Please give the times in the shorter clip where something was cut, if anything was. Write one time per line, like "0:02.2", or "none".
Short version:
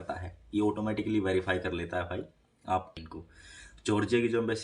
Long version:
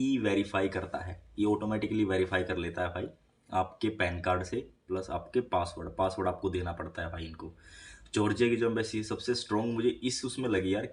0:02.9